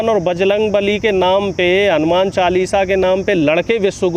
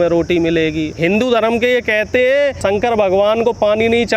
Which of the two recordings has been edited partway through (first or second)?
second